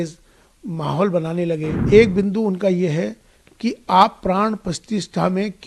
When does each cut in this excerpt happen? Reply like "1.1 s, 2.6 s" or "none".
1.7 s